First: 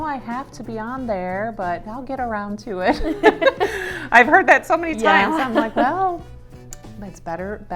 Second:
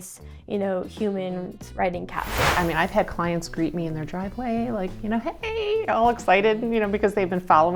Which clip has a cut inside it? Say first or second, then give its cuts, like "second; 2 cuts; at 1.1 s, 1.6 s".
second; 1 cut; at 2.5 s